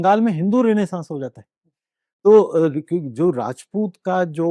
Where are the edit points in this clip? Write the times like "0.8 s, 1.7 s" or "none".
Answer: none